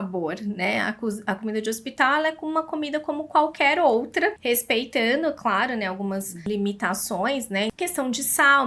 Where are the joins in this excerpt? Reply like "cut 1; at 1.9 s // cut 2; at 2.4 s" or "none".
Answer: cut 1; at 4.4 s // cut 2; at 6.5 s // cut 3; at 7.7 s